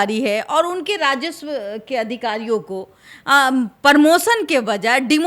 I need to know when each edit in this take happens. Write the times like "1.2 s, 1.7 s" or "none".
none